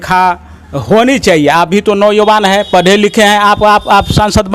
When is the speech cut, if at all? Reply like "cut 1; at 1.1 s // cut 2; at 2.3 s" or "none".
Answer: none